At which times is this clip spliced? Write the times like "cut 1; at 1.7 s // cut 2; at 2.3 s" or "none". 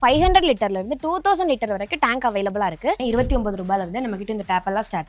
cut 1; at 3.0 s